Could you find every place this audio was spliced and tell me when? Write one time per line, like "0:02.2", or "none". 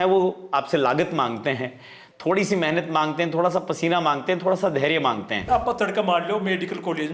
0:05.5